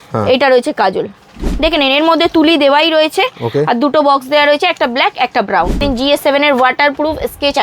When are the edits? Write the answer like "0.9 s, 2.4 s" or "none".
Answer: 1.4 s, 5.8 s